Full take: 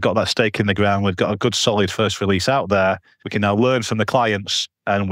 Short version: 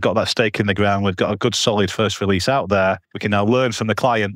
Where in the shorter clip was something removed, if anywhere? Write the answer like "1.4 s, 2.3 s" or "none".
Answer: 3.1 s